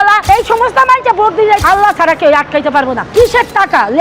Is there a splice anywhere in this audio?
yes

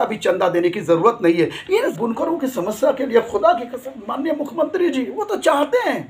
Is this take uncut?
no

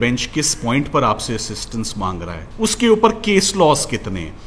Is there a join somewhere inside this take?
yes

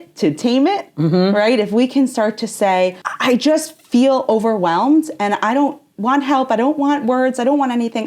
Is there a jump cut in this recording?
yes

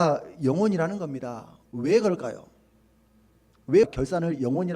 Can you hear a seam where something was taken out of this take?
yes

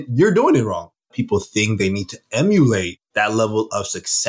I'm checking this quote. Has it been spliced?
yes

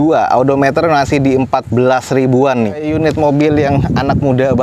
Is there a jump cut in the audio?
yes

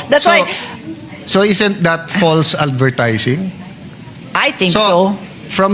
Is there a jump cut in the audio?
no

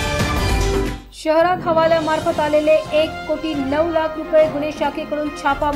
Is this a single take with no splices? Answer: no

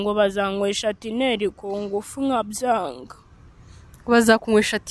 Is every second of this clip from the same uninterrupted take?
yes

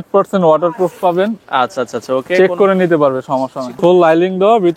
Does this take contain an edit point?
yes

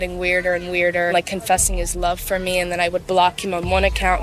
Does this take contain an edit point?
yes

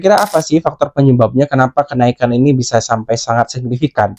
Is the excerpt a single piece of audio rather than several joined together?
yes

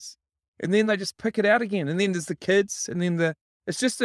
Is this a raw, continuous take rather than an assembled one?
yes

